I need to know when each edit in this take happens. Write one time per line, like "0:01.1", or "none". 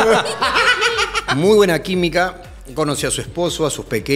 0:01.2